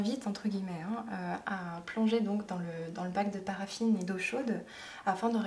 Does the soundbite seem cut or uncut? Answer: uncut